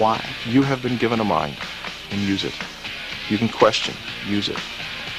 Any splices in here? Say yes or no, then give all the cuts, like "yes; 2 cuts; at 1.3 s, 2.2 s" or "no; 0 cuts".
yes; 1 cut; at 2.2 s